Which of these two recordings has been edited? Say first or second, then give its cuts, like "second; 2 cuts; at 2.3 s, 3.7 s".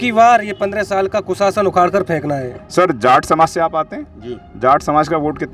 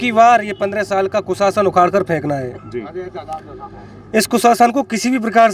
first; 1 cut; at 2.6 s